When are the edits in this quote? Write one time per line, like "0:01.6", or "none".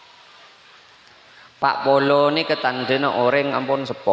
none